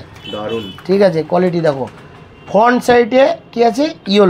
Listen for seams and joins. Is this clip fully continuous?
yes; 0 cuts

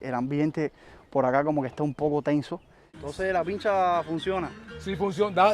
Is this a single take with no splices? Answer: no; 1 cut; at 2.8 s

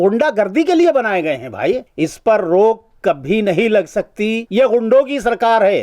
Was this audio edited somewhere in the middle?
yes; 2 cuts; at 1.9 s, 4.4 s

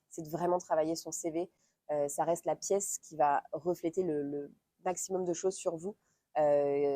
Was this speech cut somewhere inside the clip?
no; 0 cuts

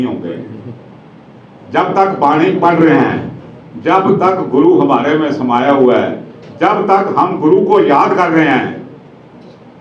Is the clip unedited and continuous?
yes; 0 cuts

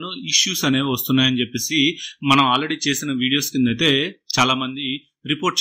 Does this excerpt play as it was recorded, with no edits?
yes; 0 cuts

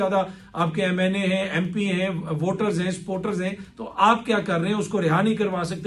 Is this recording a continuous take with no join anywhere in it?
yes; 0 cuts

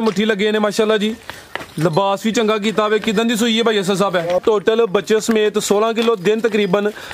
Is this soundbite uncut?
no; 1 cut; at 4.4 s

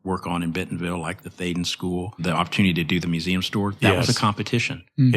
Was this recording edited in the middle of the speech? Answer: yes; 1 cut; at 2.2 s

